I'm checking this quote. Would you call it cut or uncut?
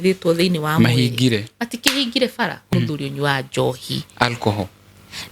cut